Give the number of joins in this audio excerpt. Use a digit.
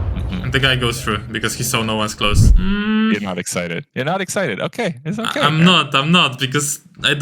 1